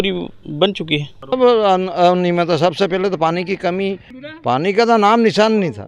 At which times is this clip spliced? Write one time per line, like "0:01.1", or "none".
0:01.1

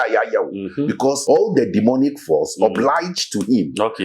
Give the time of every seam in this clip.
0:01.2

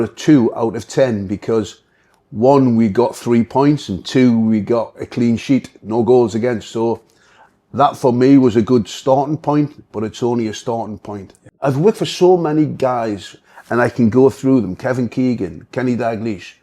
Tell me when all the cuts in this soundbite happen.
0:11.6

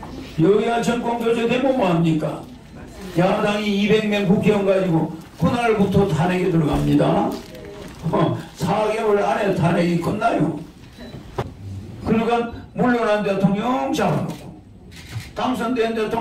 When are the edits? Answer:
0:11.4

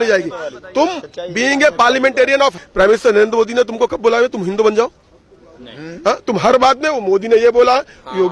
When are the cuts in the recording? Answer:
0:02.6

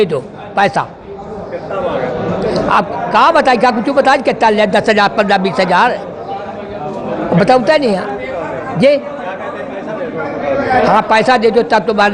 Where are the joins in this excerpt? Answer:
none

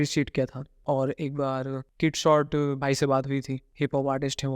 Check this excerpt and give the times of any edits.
0:00.8
0:01.9
0:03.6

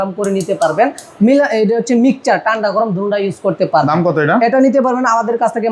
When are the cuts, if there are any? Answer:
none

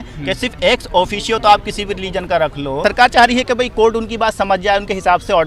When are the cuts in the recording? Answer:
0:02.8

